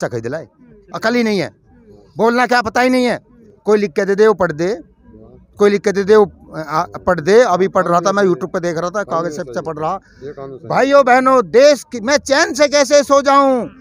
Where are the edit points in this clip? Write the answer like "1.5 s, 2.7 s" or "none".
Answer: none

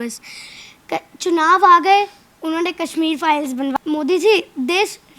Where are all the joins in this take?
3.7 s

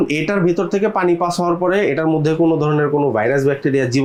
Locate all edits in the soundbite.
none

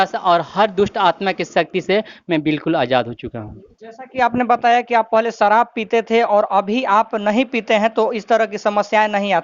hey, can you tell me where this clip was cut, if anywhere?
none

